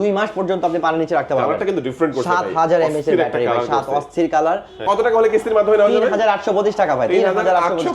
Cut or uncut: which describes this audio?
cut